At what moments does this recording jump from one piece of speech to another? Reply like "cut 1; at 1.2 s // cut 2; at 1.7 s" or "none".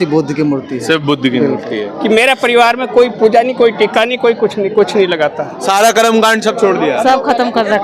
cut 1; at 1.9 s // cut 2; at 5.5 s